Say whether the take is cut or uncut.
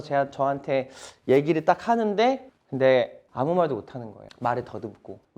cut